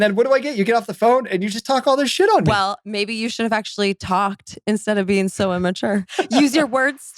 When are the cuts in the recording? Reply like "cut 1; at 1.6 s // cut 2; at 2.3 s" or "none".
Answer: cut 1; at 6.1 s